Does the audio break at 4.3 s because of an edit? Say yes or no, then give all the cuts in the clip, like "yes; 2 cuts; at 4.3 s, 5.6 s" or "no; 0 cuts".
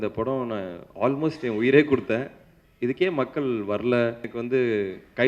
yes; 1 cut; at 4.3 s